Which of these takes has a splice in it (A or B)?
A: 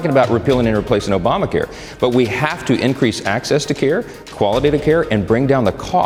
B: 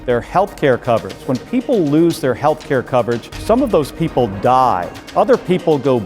B